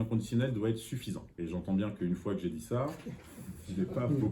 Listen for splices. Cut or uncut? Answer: cut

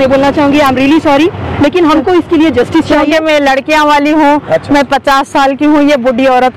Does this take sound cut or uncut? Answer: uncut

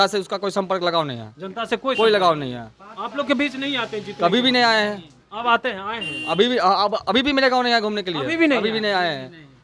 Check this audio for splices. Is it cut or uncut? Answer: uncut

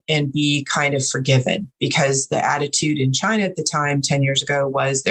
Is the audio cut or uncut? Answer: uncut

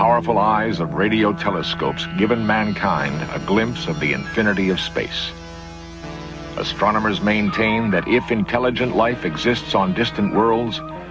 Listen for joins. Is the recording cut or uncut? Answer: cut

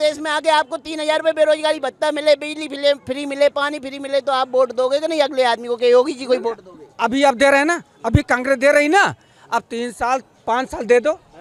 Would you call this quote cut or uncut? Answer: uncut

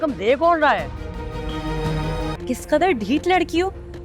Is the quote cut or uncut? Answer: cut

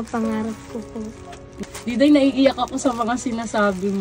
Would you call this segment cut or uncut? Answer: cut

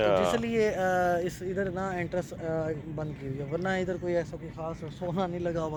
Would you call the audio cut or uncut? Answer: uncut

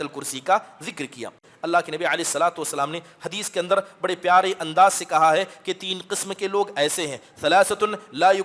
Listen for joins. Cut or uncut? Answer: cut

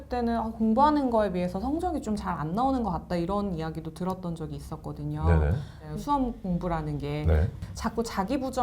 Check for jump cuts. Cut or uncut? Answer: cut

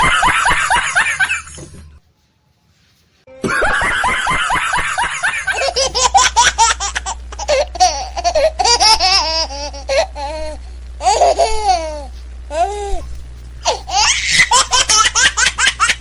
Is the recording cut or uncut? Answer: cut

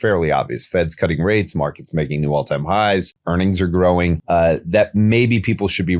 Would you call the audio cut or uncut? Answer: cut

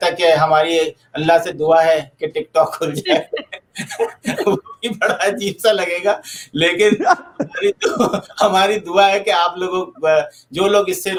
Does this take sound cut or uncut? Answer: uncut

